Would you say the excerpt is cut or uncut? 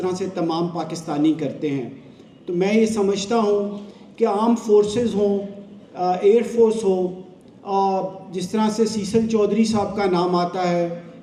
uncut